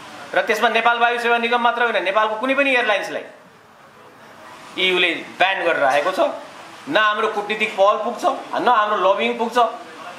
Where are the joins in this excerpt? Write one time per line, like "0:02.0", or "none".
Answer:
none

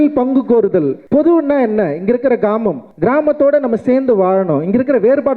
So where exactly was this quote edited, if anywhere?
0:01.0
0:02.9

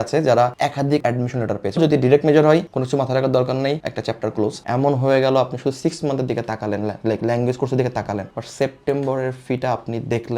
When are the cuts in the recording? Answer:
0:01.8
0:04.6

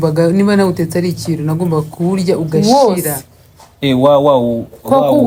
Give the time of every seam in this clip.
none

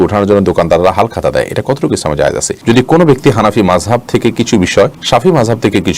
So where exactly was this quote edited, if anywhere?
0:02.6
0:05.0

